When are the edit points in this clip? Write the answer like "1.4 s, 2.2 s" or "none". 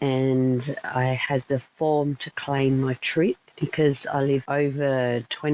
3.5 s, 4.5 s